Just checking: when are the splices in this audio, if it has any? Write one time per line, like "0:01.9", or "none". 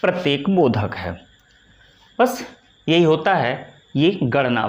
none